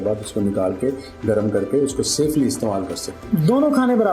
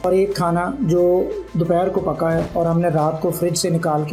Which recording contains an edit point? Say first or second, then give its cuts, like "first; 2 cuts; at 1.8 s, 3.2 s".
first; 1 cut; at 3.1 s